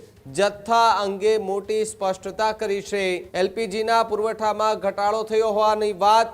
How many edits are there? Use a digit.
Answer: 1